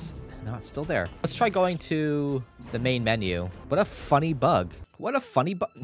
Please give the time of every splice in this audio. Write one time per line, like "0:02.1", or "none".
0:01.2
0:02.6
0:03.6
0:04.8